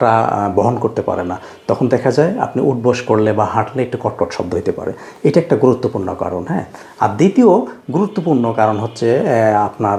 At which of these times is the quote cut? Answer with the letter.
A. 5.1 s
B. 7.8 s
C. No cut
C